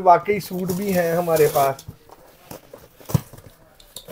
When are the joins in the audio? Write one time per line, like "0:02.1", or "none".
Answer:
none